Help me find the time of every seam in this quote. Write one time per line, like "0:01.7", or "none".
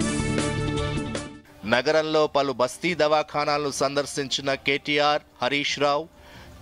none